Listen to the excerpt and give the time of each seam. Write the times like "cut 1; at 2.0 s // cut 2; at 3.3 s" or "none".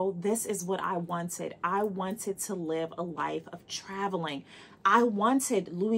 none